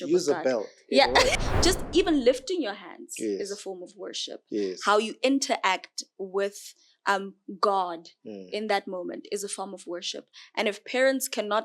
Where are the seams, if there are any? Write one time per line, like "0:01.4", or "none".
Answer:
0:01.4